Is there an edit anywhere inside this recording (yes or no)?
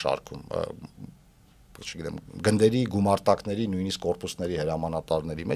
no